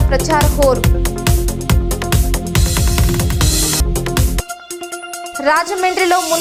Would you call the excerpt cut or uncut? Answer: uncut